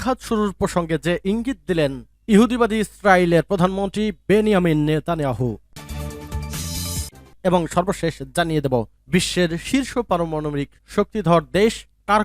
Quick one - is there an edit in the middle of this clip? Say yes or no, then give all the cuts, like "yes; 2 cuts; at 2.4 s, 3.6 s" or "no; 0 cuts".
yes; 2 cuts; at 5.7 s, 7.2 s